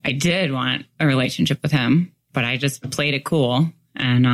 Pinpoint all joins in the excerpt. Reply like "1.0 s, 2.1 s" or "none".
none